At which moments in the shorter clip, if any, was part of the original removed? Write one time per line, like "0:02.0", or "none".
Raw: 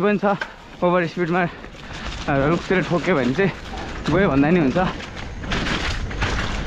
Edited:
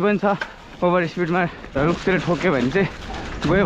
0:01.8